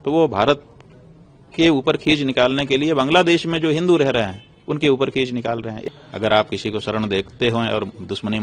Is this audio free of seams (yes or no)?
no